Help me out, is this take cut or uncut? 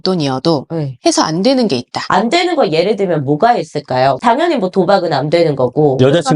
cut